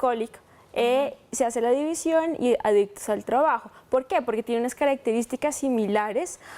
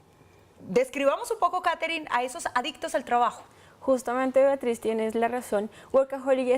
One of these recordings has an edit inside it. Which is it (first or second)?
second